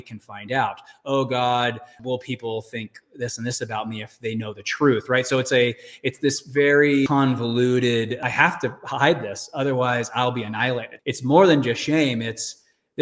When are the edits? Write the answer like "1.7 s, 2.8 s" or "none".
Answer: 1.9 s, 7.1 s, 8.2 s, 10.9 s